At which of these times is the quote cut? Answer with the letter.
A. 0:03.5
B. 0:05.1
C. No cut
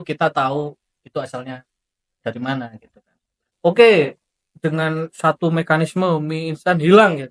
A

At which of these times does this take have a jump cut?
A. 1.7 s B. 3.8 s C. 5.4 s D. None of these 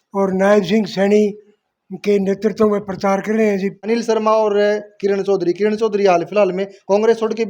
B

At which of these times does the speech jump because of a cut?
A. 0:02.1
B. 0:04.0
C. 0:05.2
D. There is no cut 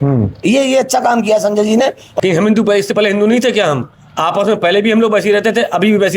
A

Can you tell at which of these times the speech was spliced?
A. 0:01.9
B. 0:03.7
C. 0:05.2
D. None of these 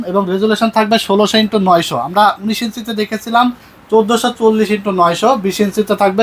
D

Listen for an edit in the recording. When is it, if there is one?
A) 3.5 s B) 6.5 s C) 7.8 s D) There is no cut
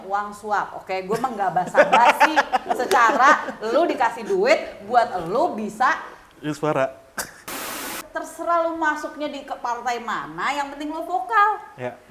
C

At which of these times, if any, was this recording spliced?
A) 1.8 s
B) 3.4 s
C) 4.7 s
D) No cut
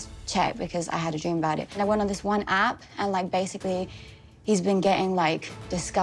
A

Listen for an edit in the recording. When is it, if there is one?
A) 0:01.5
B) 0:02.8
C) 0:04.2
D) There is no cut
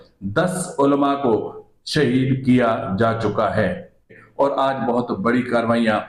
C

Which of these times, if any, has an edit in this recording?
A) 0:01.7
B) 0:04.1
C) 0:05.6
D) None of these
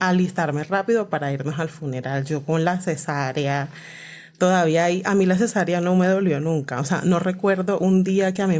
D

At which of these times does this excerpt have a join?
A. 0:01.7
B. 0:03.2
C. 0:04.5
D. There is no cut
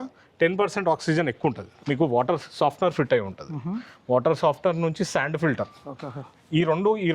A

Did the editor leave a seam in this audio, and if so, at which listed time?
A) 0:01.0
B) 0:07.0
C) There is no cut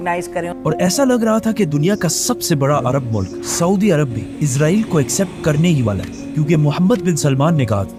C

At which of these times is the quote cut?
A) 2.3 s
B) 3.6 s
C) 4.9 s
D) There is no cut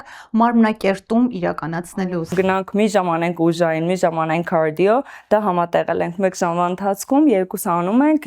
A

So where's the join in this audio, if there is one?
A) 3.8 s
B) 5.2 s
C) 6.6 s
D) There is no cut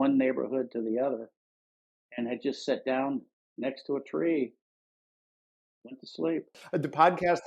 C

